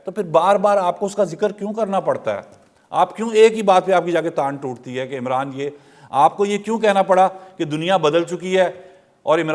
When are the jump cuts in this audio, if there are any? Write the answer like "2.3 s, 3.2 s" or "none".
none

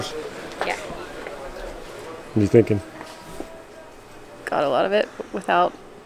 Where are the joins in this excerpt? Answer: 2.9 s

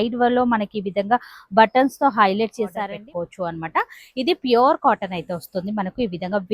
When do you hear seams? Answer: 2.8 s

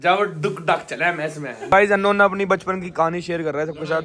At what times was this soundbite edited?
1.6 s

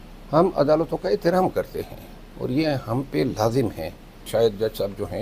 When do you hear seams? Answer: 4.1 s

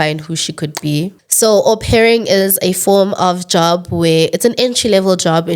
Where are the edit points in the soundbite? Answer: 1.2 s

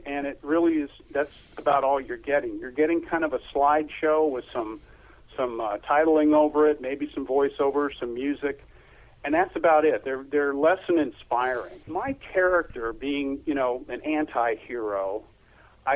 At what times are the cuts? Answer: 11.9 s

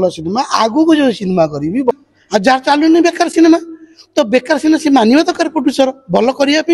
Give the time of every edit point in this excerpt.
1.9 s

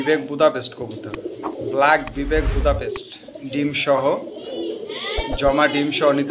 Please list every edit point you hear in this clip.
none

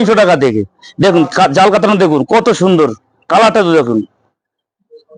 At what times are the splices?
none

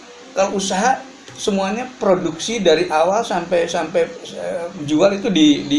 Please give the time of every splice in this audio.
none

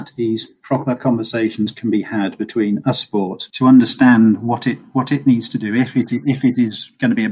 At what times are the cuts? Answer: none

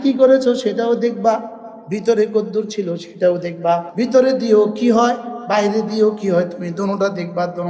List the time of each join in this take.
3.9 s

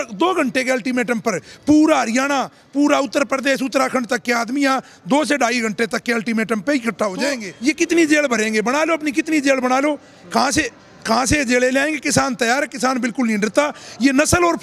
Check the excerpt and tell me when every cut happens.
7.5 s

